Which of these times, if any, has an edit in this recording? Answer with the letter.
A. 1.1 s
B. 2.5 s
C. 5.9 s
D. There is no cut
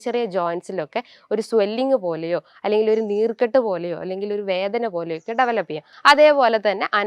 C